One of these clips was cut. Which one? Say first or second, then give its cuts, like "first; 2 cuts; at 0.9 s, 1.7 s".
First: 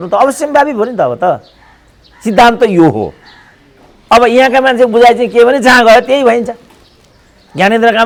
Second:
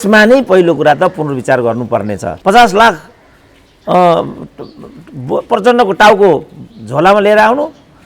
second; 1 cut; at 2.3 s